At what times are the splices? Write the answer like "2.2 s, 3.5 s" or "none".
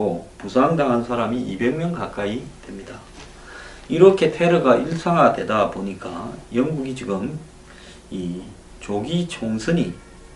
none